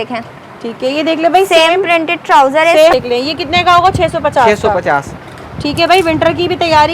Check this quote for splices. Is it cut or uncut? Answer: cut